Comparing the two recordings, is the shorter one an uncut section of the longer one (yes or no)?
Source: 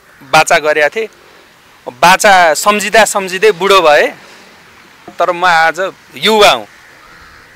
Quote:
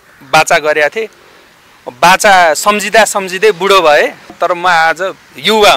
no